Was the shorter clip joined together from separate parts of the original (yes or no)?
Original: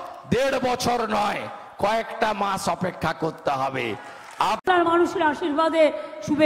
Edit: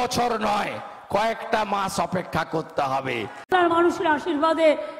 yes